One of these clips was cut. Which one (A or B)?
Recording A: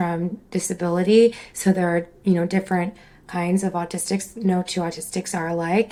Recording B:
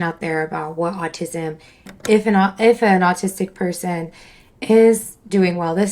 B